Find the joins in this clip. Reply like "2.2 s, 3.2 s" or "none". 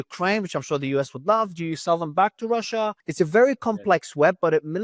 3.0 s